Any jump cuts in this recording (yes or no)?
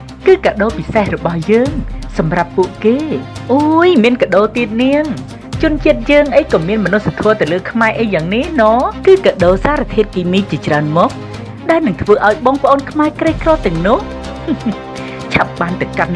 no